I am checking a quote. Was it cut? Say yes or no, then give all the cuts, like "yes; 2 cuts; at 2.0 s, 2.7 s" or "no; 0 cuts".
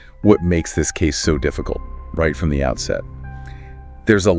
no; 0 cuts